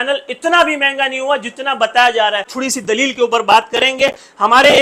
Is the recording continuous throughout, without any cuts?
yes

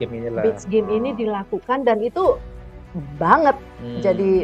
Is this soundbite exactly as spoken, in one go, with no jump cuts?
yes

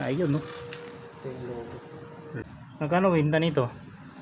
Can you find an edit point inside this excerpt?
yes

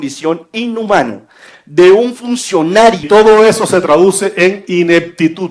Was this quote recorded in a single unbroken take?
no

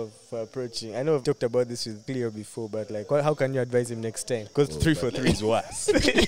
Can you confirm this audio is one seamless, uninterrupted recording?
no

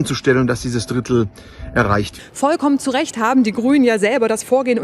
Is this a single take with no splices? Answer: no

